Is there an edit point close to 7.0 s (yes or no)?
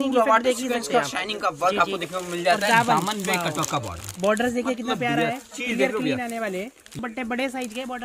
yes